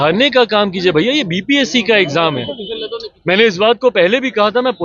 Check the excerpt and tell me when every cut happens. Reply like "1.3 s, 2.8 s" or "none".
none